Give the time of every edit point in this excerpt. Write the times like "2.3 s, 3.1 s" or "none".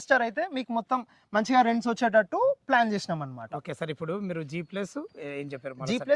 none